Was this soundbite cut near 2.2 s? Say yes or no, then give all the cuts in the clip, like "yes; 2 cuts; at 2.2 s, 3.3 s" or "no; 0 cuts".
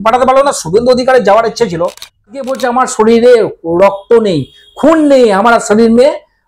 yes; 1 cut; at 2.2 s